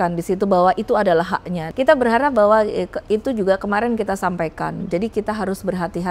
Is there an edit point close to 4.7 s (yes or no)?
no